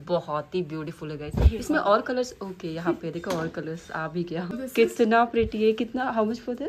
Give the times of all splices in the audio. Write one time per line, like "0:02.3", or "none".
0:04.6